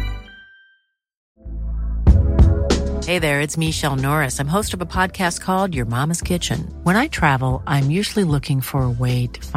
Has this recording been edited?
yes; 1 cut; at 1.2 s

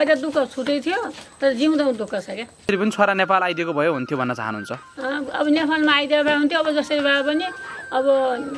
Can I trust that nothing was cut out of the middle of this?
no; 1 cut; at 2.7 s

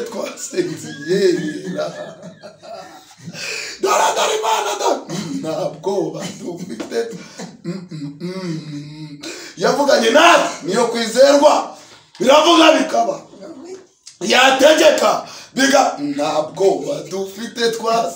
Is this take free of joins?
yes; 0 cuts

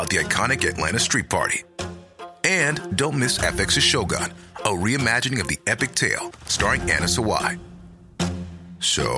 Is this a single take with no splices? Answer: yes; 0 cuts

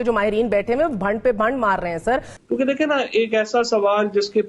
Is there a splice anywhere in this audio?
yes; 1 cut; at 2.3 s

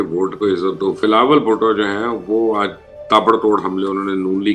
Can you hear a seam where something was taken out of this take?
yes; 1 cut; at 1.0 s

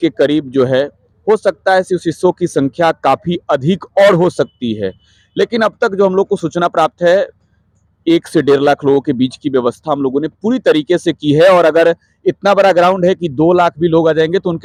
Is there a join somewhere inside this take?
no; 0 cuts

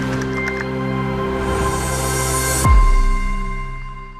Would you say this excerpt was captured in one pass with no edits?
yes; 0 cuts

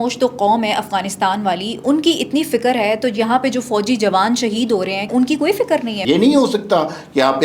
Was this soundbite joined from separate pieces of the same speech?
yes; 2 cuts; at 5.1 s, 5.9 s

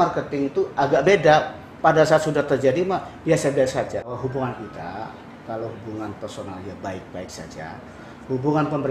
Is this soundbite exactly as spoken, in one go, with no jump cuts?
no; 1 cut; at 4.1 s

